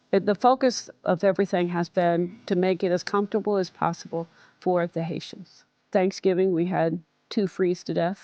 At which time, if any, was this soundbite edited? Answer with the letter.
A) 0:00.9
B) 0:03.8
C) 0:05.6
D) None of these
A